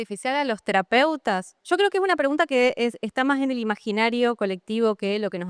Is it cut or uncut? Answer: uncut